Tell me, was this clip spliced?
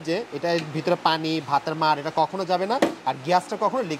no; 0 cuts

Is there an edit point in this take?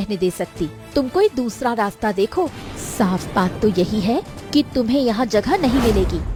no; 0 cuts

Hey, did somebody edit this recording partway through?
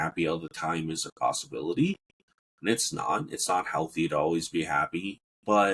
no; 0 cuts

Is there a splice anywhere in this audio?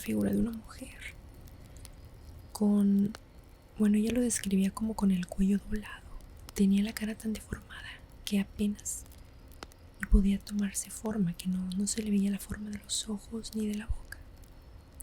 yes; 1 cut; at 6.5 s

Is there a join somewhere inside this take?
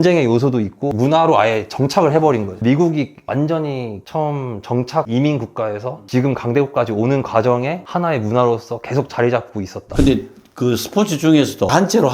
yes; 2 cuts; at 2.6 s, 9.9 s

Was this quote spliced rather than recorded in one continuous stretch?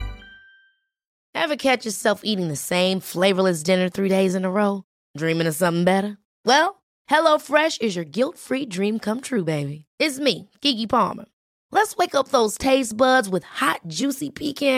no; 0 cuts

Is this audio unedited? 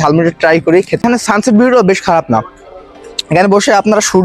no; 1 cut; at 1.0 s

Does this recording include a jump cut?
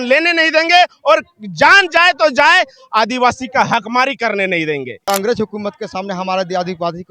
yes; 1 cut; at 5.0 s

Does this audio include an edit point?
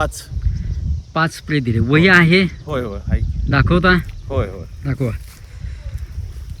no; 0 cuts

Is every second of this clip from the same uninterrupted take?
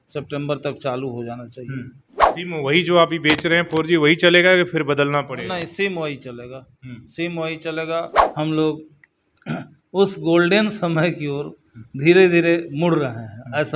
no; 2 cuts; at 2.3 s, 8.2 s

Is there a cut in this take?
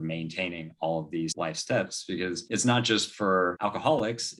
yes; 3 cuts; at 1.3 s, 2.4 s, 3.5 s

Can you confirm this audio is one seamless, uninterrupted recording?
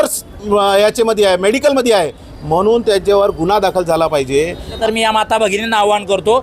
no; 1 cut; at 4.8 s

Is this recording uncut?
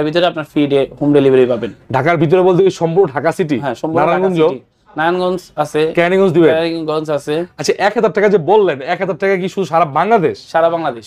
yes; 0 cuts

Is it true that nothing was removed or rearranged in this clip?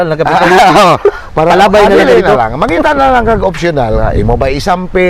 yes; 0 cuts

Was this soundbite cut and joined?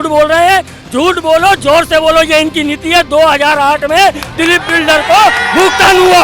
no; 0 cuts

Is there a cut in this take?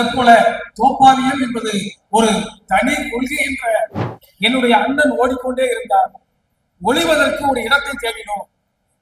yes; 1 cut; at 4.0 s

